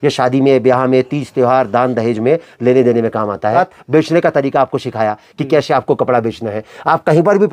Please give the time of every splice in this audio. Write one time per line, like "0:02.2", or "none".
0:03.6